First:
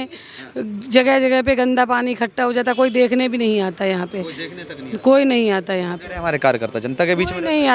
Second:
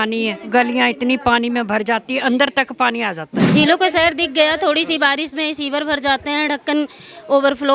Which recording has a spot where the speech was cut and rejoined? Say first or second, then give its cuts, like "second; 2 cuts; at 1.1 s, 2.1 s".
second; 1 cut; at 3.4 s